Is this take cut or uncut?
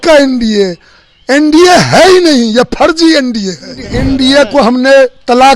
cut